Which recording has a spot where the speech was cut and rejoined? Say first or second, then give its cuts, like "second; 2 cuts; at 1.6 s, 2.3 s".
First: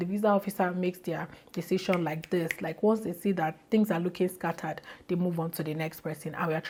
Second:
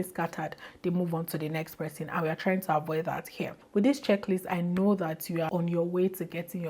second; 2 cuts; at 3.6 s, 5.5 s